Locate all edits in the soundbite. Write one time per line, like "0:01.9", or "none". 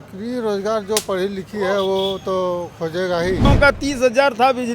0:03.5